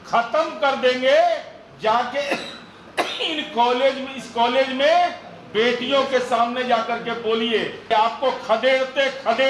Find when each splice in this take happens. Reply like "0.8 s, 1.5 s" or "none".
7.8 s